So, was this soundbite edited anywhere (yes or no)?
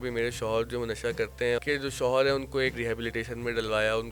yes